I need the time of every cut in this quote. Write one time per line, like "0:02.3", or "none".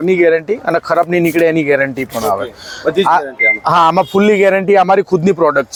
none